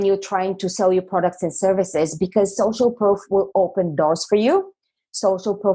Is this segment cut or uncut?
uncut